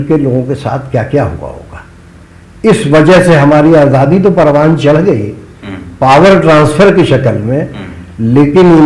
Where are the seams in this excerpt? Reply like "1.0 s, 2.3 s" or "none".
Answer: none